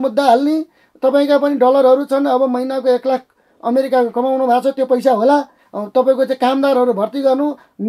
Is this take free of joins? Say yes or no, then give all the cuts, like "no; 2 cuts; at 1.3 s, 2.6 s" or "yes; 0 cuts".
yes; 0 cuts